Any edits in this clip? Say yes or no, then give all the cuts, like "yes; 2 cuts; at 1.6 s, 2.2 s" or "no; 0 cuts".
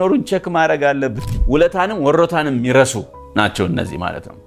yes; 1 cut; at 1.3 s